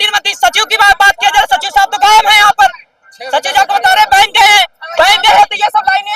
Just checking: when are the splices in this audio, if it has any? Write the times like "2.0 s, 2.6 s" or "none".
none